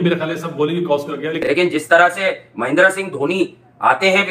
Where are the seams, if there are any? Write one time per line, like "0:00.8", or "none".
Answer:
0:01.4